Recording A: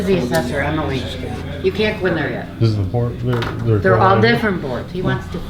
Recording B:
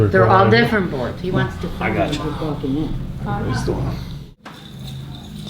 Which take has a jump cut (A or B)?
B